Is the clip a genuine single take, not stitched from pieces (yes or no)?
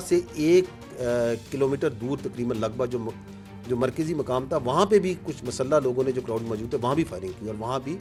yes